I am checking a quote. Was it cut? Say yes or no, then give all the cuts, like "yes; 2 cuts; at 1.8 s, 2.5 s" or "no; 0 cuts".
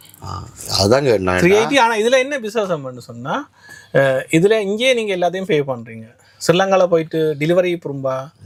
no; 0 cuts